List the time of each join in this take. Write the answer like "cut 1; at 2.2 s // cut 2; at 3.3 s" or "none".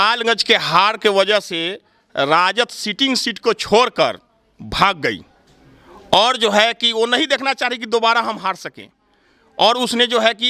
none